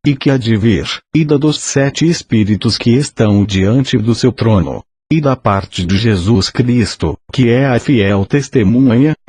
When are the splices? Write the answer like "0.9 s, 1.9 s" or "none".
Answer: none